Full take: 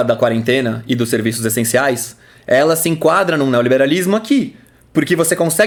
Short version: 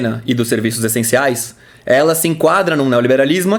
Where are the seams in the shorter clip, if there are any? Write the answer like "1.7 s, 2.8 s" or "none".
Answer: none